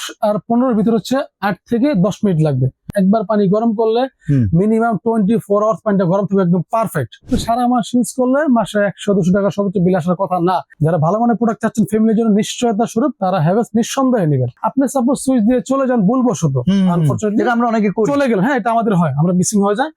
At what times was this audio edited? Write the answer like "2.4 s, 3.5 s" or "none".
2.9 s, 7.3 s, 10.7 s, 14.6 s

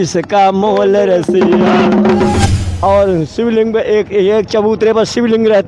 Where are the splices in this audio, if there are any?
2.4 s

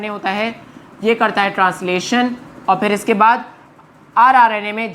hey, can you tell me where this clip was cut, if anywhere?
none

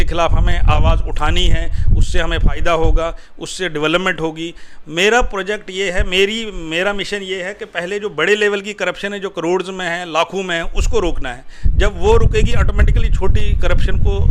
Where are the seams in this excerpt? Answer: none

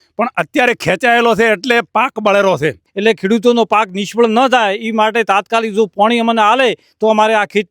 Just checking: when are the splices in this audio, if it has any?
2.9 s

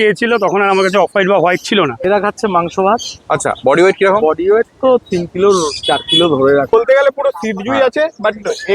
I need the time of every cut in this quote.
2.0 s, 6.7 s

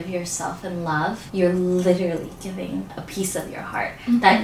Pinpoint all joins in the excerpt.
1.2 s, 2.9 s

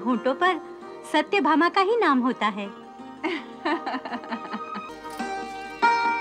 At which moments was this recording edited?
4.9 s

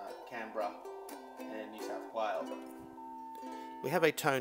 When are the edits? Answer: 2.6 s

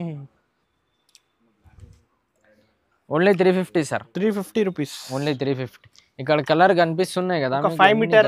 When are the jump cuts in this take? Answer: none

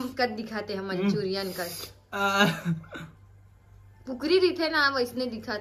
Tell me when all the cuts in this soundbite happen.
none

